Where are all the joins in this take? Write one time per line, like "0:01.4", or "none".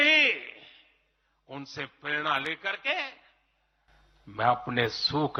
none